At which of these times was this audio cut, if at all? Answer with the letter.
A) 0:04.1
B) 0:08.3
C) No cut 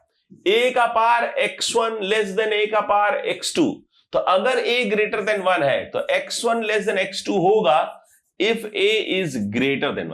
C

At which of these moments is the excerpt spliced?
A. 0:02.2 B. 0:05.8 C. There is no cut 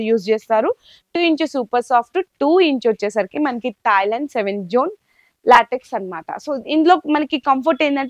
C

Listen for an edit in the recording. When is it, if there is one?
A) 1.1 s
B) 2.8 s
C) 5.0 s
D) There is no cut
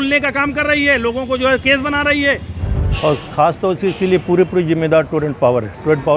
B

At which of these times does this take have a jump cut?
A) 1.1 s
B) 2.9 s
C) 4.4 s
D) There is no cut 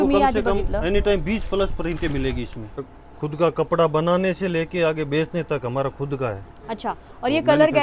B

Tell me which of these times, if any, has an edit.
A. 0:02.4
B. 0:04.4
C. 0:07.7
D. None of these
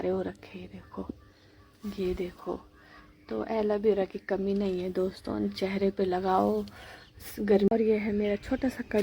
C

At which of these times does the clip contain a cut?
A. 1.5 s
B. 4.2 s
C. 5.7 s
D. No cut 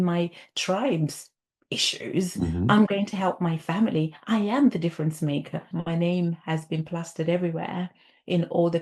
C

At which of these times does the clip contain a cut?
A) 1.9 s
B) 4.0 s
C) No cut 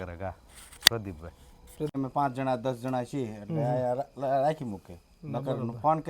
A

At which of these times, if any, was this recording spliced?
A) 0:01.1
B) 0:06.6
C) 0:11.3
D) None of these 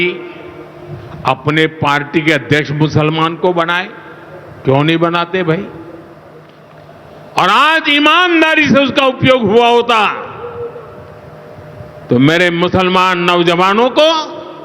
B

